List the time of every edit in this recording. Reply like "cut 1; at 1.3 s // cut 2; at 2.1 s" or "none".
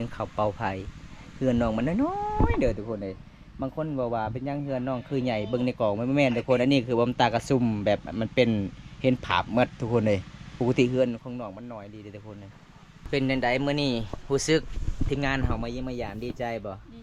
cut 1; at 13.0 s

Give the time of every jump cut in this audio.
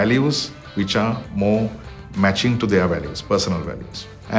none

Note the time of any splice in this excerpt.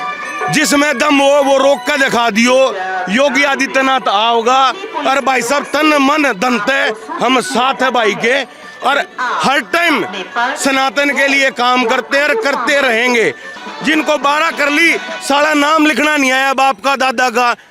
cut 1; at 13.6 s

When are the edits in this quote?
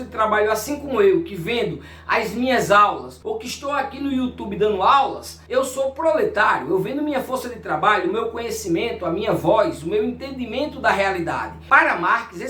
cut 1; at 11.5 s

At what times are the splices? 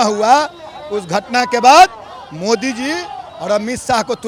none

